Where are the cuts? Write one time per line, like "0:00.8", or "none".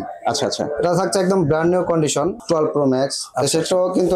0:02.3